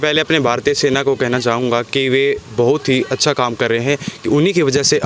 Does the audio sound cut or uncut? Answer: uncut